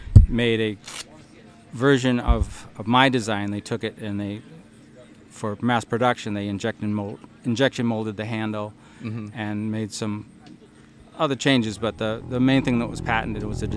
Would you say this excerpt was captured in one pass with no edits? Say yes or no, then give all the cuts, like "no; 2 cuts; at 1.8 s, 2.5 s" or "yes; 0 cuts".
yes; 0 cuts